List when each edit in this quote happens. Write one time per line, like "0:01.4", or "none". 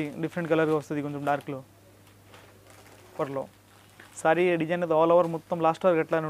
0:03.2